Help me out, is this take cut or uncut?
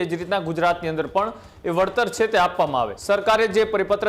cut